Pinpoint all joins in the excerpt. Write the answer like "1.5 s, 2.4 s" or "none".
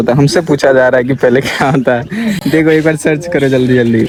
none